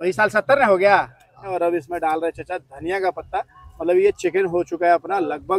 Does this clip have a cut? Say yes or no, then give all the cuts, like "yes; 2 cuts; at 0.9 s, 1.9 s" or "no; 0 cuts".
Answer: yes; 1 cut; at 1.5 s